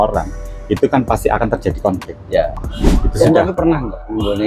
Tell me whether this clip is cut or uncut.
cut